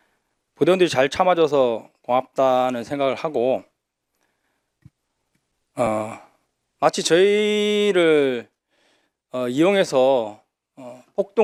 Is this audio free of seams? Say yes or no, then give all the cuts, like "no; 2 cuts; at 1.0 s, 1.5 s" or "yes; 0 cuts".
yes; 0 cuts